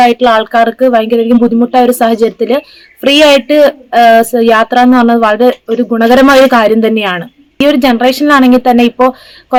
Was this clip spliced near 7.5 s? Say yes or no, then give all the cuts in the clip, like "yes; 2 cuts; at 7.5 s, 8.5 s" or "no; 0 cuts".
no; 0 cuts